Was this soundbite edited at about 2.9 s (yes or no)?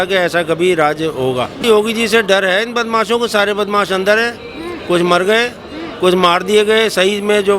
no